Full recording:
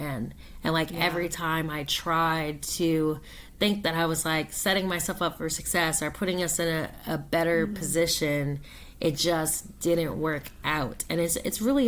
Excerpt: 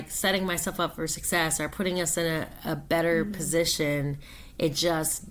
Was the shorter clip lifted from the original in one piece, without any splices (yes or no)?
yes